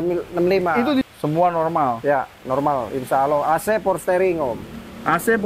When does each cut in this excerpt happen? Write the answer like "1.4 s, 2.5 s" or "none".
1.0 s